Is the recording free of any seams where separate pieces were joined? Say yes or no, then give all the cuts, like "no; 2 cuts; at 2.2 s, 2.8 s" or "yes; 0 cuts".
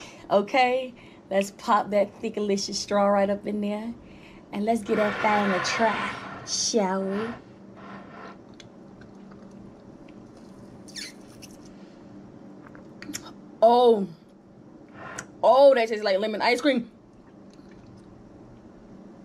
yes; 0 cuts